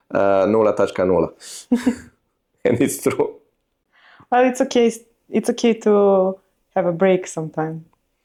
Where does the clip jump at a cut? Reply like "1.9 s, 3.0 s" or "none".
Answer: none